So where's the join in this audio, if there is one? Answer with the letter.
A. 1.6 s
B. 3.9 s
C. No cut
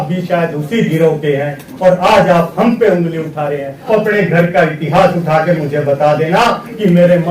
B